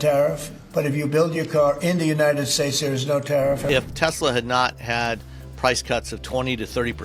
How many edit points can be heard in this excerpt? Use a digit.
1